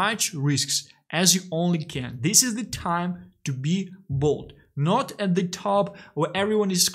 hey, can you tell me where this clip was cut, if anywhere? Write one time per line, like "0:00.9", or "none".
none